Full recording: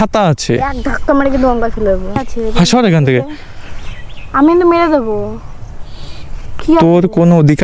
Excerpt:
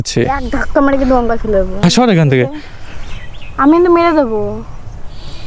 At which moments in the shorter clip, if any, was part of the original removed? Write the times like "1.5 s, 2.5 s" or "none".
1.7 s